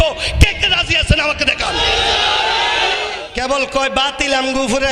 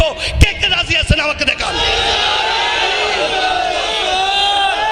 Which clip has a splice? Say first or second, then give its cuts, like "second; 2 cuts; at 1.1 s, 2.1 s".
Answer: first; 1 cut; at 3.1 s